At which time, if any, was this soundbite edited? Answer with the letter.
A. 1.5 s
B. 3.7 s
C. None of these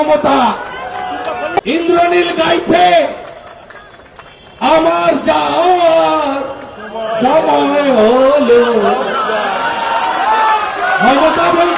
A